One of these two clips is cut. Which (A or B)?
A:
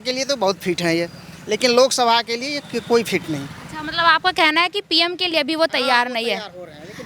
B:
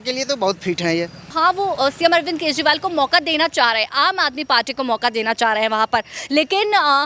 B